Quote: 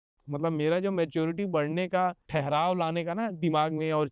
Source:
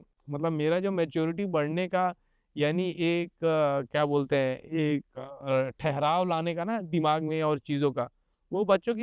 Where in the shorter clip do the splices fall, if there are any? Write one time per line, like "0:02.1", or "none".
0:02.2